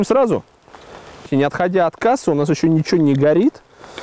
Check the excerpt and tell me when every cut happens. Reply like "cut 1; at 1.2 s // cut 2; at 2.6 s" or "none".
cut 1; at 1.3 s